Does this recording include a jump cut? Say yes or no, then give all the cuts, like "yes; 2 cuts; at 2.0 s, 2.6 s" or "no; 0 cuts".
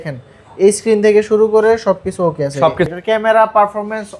yes; 1 cut; at 2.9 s